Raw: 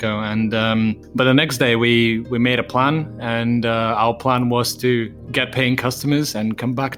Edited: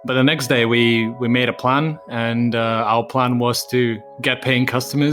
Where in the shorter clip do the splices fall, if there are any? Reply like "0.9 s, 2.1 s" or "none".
none